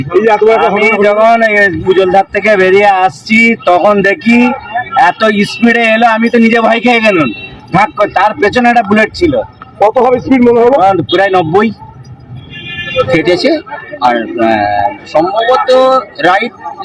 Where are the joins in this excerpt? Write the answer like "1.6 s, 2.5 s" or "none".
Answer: 13.0 s